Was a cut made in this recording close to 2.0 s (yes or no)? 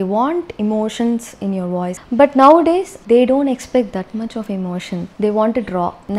yes